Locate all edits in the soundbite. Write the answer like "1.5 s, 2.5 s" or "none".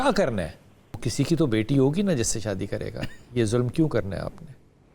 1.1 s